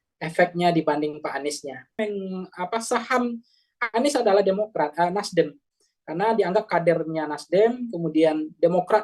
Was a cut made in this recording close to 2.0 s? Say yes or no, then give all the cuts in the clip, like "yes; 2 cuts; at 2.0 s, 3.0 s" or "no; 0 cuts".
yes; 1 cut; at 2.0 s